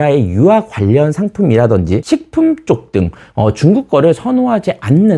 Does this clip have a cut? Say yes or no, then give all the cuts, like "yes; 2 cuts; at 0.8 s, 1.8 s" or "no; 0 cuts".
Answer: yes; 1 cut; at 2.0 s